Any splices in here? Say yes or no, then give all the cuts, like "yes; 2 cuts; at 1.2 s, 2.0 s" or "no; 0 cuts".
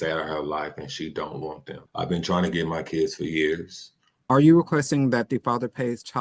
yes; 2 cuts; at 1.8 s, 4.2 s